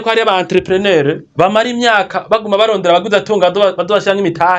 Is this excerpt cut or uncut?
cut